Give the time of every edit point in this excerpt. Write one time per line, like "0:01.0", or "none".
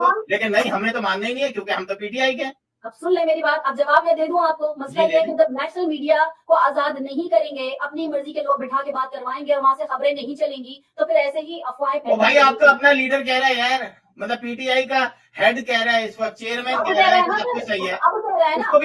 none